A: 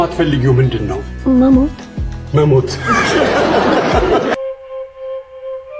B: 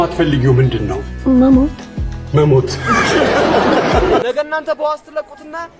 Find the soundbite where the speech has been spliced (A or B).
B